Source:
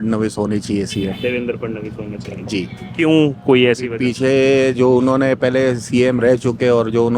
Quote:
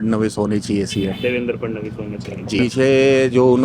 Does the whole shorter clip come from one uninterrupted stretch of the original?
no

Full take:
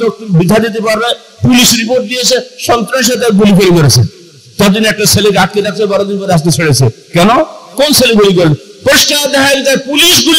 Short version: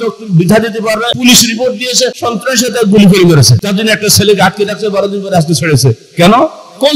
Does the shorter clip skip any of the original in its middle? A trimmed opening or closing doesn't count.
yes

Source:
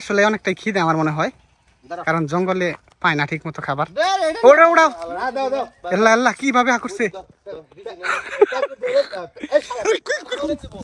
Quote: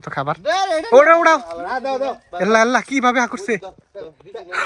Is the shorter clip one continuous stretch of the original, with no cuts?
yes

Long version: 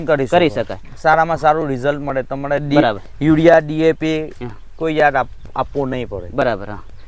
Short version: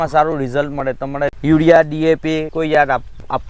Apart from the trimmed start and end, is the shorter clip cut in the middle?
yes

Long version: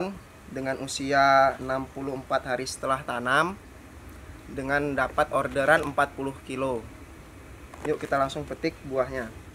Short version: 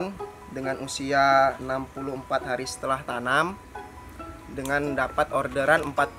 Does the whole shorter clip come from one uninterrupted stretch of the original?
yes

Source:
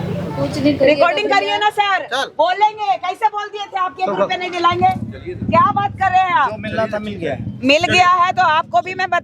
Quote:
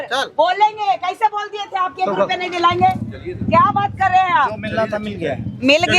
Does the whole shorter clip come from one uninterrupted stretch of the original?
yes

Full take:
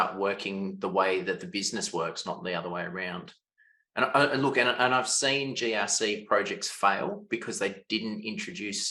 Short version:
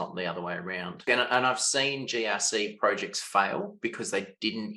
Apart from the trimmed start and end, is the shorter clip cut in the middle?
yes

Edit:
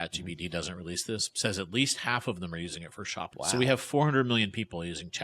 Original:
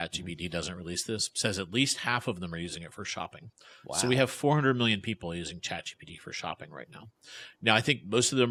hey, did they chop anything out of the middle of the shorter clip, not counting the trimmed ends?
yes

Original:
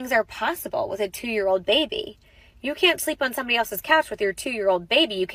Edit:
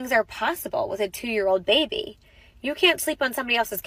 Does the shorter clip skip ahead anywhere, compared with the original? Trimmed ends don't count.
no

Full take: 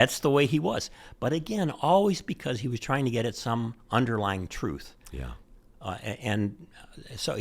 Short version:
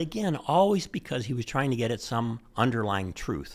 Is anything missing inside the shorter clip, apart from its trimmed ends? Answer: no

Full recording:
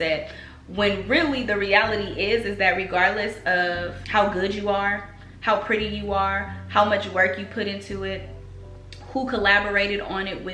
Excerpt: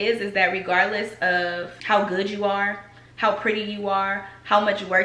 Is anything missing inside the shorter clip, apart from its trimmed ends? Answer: no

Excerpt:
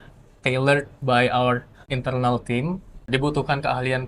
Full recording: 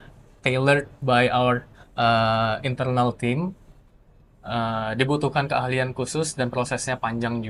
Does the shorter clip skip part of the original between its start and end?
yes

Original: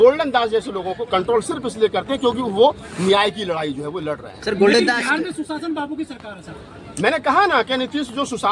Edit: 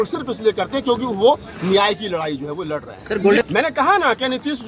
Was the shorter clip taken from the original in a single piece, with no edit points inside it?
no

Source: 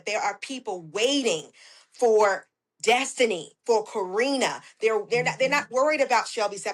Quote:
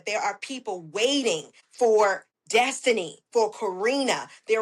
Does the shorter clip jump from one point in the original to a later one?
yes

